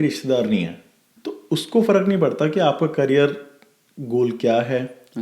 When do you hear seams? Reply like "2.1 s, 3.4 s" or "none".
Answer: 1.1 s